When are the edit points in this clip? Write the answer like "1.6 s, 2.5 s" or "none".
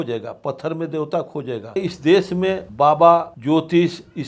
1.8 s, 2.6 s, 3.3 s